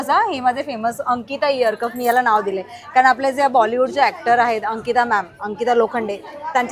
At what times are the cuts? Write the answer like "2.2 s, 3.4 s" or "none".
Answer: none